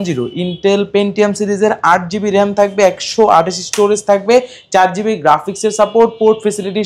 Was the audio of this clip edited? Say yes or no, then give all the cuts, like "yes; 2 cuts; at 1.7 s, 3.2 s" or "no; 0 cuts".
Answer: no; 0 cuts